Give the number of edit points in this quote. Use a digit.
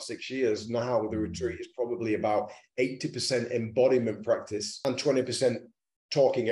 1